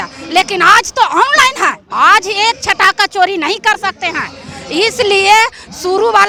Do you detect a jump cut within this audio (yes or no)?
no